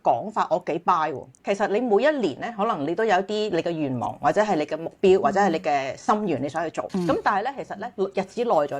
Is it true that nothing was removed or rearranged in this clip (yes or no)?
no